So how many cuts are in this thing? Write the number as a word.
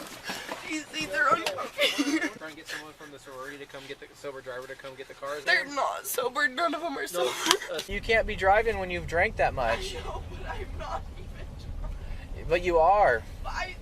three